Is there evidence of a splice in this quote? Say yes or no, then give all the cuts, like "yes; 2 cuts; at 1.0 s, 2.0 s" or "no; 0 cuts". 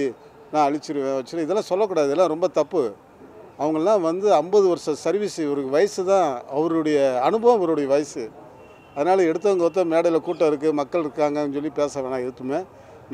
no; 0 cuts